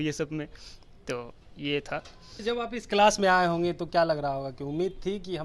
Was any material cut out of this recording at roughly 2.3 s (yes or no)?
yes